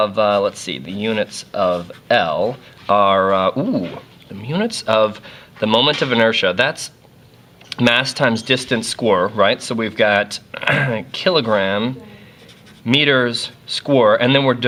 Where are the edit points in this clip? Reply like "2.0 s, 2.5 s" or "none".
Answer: none